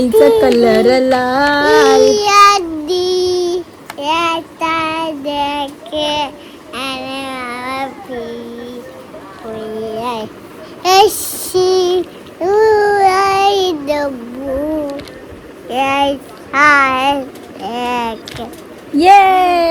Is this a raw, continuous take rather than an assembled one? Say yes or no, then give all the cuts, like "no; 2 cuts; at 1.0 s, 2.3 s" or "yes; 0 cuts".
yes; 0 cuts